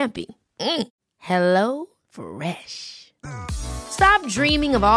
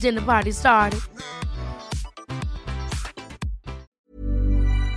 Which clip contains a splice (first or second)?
second